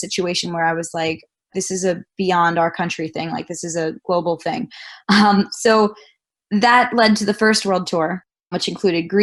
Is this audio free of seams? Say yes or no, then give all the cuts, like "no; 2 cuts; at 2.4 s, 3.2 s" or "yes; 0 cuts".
yes; 0 cuts